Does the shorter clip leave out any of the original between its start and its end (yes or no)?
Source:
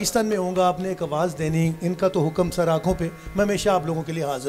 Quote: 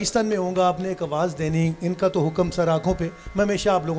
no